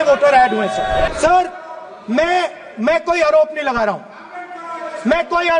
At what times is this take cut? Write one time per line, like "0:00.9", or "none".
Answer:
0:01.1